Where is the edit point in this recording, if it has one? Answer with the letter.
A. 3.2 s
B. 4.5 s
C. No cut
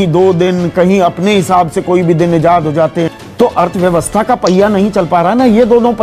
A